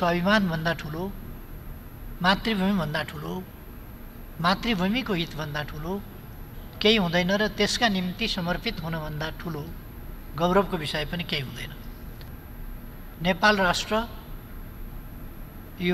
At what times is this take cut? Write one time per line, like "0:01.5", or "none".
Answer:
0:12.3